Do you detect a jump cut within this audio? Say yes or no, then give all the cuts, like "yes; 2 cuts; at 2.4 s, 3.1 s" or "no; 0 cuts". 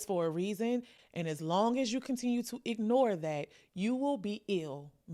yes; 1 cut; at 0.9 s